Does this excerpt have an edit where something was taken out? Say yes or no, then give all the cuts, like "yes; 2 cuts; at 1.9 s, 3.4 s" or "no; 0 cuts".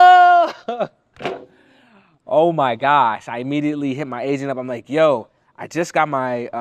no; 0 cuts